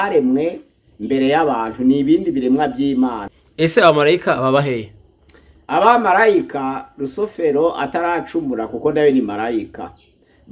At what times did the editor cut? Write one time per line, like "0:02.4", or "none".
0:03.3